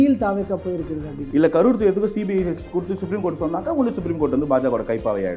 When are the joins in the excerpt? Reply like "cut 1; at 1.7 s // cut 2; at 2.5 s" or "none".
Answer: cut 1; at 1.2 s